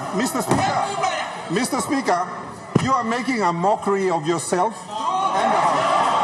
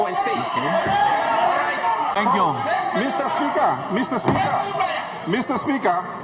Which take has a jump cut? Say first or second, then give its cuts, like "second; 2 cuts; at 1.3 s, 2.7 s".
second; 1 cut; at 2.2 s